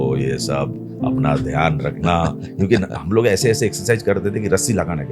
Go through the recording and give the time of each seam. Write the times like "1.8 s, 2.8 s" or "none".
none

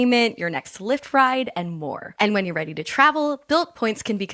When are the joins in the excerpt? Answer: 2.0 s

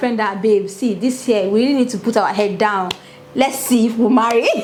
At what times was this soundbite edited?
none

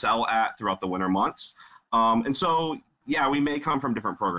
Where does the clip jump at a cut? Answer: none

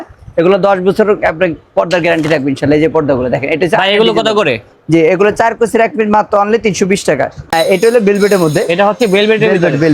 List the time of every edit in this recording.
7.4 s

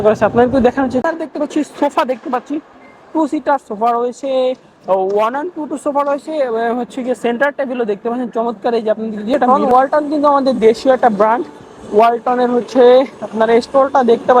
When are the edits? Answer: 1.0 s, 9.5 s

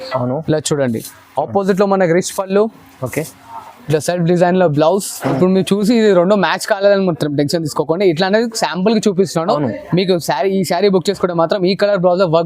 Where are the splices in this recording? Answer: 5.3 s

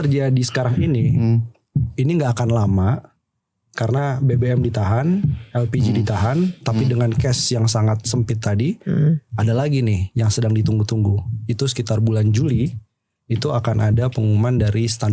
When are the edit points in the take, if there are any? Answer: none

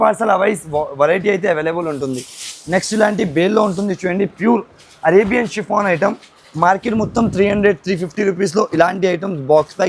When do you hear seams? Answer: none

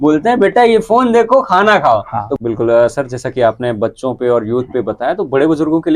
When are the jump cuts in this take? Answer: 2.3 s

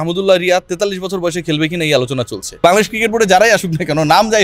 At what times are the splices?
2.6 s

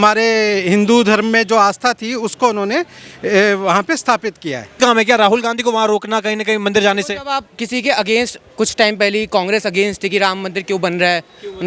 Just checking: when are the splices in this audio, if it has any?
4.8 s

